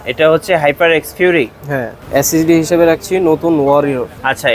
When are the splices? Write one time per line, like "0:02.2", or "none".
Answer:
0:02.0